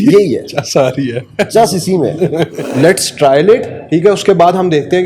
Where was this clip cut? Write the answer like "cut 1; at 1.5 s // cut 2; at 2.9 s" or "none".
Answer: cut 1; at 2.6 s